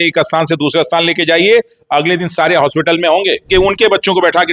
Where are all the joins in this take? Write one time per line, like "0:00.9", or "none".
0:03.5

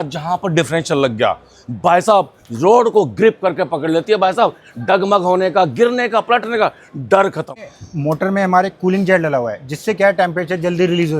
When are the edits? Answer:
0:07.7

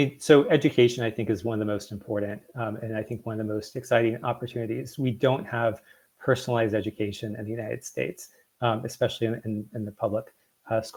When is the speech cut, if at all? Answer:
none

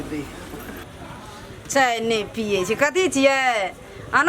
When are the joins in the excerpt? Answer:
0:01.1

